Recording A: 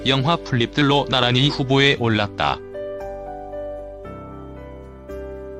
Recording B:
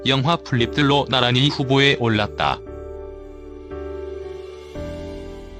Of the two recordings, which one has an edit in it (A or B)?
B